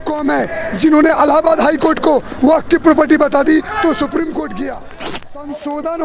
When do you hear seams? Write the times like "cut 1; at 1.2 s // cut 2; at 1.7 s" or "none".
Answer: cut 1; at 5.0 s